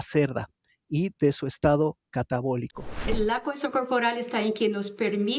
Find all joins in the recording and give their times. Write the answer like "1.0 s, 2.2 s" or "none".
3.1 s